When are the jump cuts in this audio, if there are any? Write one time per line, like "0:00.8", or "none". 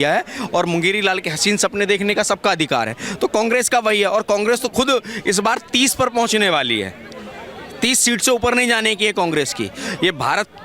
none